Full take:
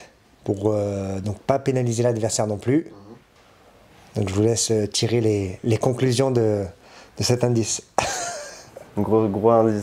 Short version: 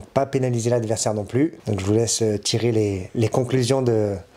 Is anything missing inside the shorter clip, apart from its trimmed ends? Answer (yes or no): yes